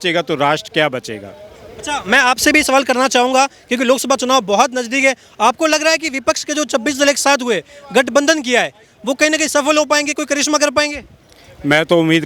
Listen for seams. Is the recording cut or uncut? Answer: uncut